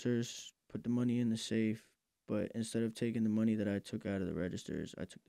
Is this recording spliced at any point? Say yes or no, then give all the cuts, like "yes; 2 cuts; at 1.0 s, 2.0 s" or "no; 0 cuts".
no; 0 cuts